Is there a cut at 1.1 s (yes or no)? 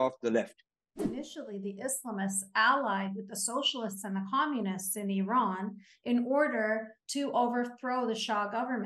yes